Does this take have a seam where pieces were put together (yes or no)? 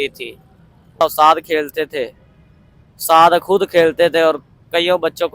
yes